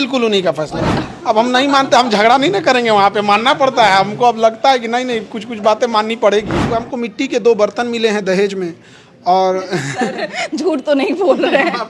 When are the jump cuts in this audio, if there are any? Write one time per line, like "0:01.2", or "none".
0:01.0
0:06.8